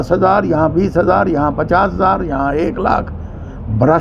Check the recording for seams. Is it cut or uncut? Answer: uncut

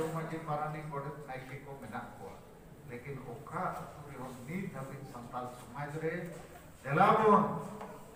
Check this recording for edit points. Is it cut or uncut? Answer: uncut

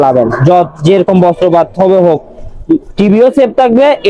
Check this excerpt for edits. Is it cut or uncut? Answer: uncut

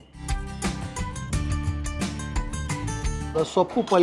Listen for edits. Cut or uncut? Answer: uncut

